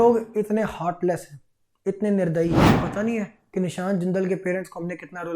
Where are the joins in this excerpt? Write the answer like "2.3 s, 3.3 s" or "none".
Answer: 2.7 s